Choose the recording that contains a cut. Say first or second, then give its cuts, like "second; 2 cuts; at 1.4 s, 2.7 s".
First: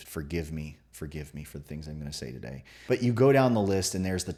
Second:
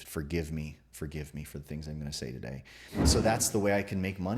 second; 1 cut; at 2.8 s